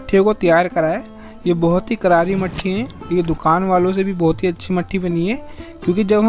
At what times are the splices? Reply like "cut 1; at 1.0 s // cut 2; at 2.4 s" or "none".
none